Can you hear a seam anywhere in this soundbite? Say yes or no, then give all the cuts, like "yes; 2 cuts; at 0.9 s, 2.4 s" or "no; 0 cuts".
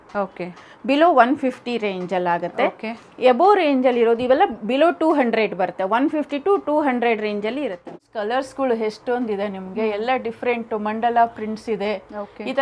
yes; 1 cut; at 7.9 s